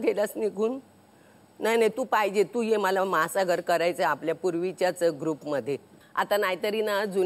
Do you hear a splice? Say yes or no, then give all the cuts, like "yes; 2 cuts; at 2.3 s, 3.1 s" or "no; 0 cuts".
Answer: yes; 1 cut; at 6.0 s